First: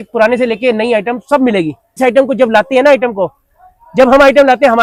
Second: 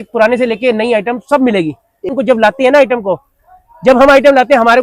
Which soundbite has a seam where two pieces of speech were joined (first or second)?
second